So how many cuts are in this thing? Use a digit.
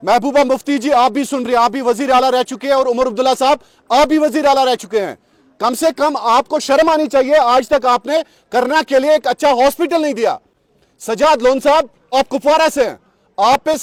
0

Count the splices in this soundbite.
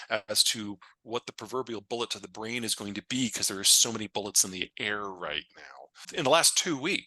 1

